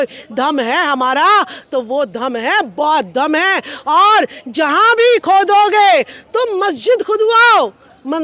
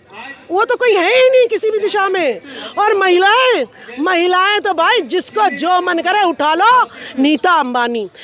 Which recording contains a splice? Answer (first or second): second